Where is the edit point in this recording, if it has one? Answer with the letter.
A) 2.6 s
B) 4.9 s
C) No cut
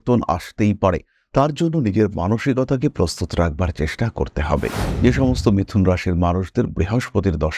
B